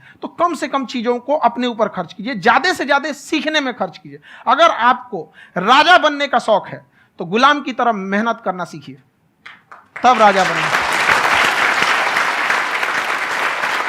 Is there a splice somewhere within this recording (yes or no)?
no